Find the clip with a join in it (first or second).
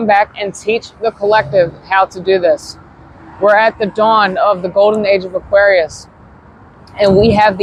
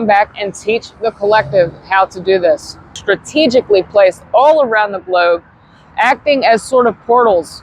second